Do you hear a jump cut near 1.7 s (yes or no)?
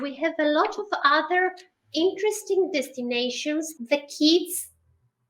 no